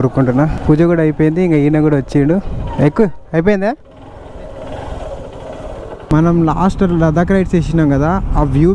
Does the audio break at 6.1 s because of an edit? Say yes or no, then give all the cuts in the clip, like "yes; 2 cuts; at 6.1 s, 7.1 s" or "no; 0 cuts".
yes; 1 cut; at 6.1 s